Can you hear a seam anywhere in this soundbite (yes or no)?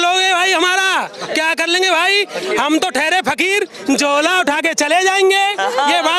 no